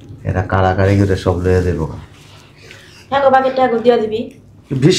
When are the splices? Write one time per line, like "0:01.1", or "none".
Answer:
none